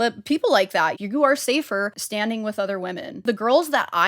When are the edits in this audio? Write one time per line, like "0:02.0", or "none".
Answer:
0:01.0
0:02.0
0:03.2